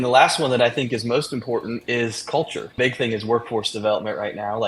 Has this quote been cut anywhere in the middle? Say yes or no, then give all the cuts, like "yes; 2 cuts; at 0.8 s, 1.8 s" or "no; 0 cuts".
yes; 2 cuts; at 1.8 s, 2.7 s